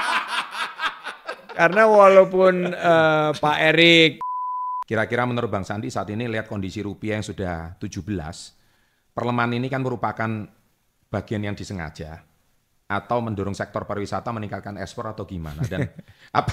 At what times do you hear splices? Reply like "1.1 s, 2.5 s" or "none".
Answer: 4.2 s

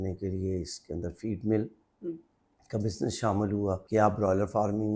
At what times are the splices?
3.8 s

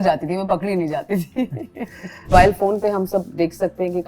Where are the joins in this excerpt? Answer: 2.3 s

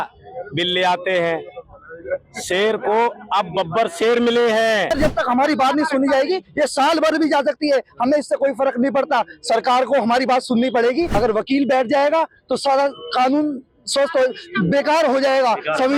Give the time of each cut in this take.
4.9 s, 11.1 s

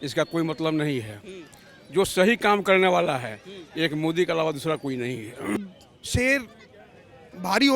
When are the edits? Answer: 5.6 s

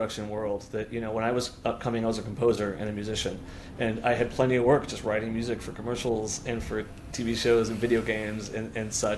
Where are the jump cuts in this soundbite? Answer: none

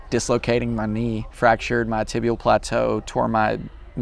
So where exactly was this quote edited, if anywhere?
1.3 s

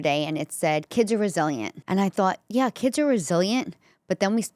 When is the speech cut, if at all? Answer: 1.7 s

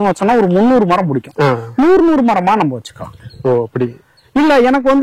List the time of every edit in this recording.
none

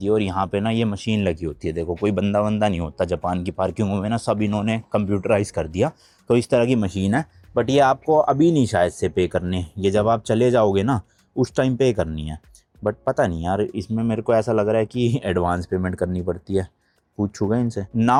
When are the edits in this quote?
none

